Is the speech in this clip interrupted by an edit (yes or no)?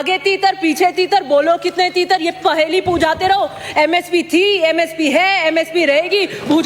no